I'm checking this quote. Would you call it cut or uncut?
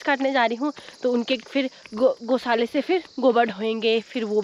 uncut